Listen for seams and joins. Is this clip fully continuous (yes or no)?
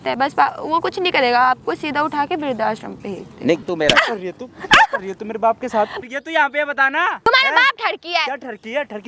no